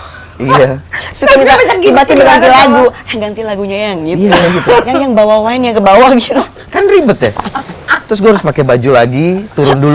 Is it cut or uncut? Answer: uncut